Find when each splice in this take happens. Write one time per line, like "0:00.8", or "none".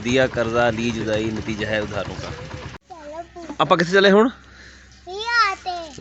0:02.7